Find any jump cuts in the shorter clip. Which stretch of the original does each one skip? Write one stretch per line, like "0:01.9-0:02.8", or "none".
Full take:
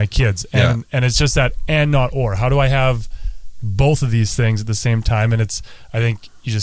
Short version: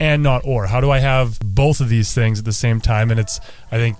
0:03.1-0:03.6